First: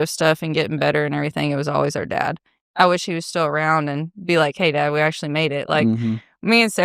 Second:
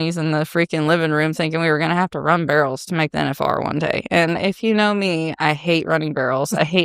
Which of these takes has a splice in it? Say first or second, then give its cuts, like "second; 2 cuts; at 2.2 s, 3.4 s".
first; 1 cut; at 2.5 s